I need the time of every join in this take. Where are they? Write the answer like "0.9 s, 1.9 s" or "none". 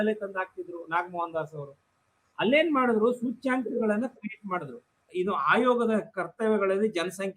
5.1 s